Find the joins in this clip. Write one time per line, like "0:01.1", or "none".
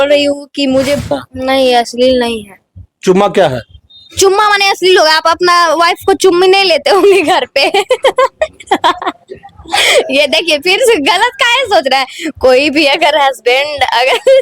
0:01.1